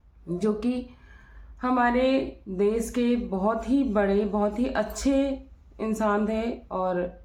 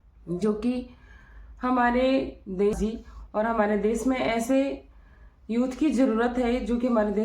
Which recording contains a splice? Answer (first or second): second